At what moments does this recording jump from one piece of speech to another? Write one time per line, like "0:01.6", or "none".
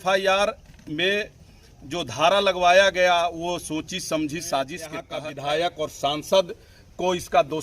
0:05.0